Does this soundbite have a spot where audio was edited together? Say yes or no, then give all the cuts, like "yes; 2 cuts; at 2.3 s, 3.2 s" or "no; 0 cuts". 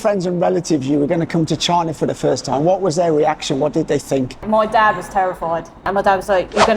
yes; 2 cuts; at 4.4 s, 5.9 s